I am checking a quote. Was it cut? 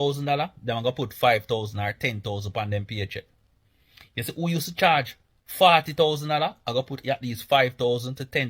no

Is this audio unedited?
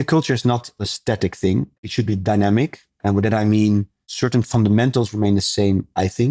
no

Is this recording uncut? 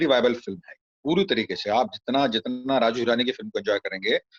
yes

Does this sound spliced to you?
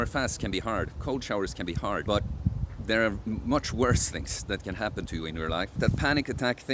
yes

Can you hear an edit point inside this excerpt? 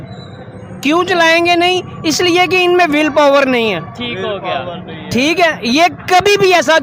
no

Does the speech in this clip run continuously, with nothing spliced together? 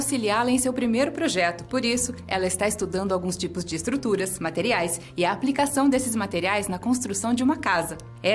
no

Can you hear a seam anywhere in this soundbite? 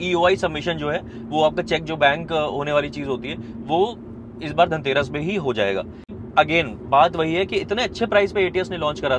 yes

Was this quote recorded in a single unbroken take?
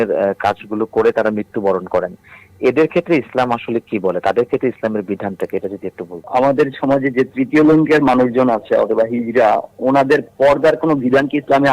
no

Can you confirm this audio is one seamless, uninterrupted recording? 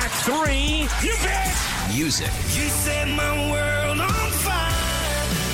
yes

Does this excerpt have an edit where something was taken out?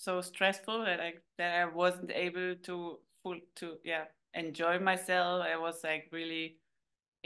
no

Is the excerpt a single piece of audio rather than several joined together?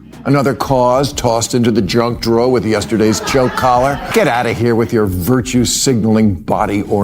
no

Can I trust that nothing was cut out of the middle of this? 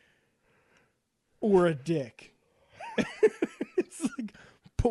yes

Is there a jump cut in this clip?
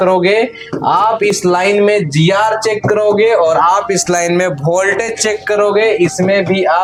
no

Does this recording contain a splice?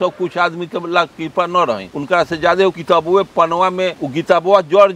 yes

